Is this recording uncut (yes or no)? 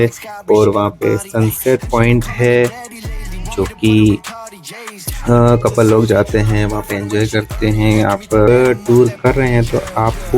no